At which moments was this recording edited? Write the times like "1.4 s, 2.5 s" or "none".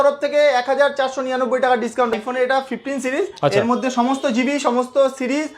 2.1 s